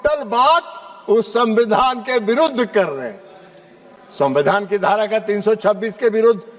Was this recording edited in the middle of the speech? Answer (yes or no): no